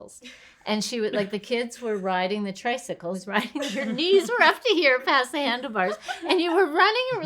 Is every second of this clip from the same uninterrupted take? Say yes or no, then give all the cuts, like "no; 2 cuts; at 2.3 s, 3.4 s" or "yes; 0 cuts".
no; 1 cut; at 3.2 s